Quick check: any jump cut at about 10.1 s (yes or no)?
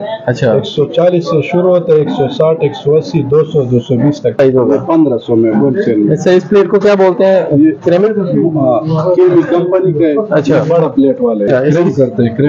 no